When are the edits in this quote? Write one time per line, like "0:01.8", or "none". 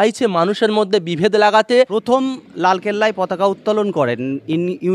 0:01.7